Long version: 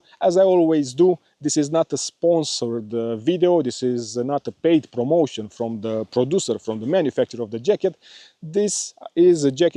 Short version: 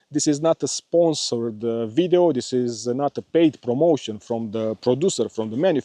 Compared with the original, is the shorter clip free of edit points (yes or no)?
yes